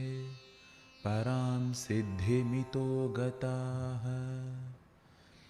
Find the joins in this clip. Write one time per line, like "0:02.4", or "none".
0:04.4